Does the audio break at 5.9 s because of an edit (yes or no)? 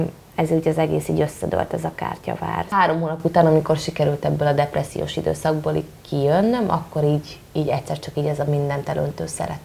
no